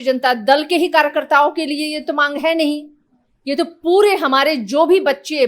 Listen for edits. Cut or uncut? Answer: uncut